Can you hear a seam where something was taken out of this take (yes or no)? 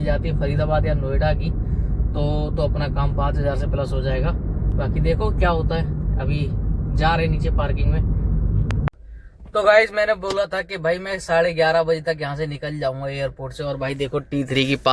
no